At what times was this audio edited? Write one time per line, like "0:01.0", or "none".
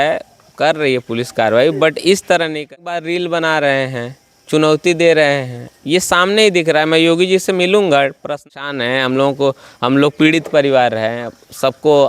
0:02.6
0:08.5